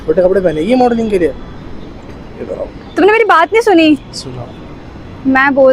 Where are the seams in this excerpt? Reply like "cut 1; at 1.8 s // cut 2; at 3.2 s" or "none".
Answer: cut 1; at 1.6 s